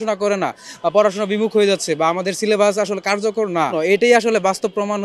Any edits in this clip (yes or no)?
yes